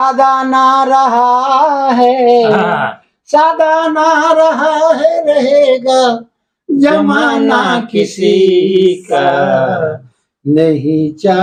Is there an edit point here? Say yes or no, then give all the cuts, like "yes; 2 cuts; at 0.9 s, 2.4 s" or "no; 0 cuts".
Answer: no; 0 cuts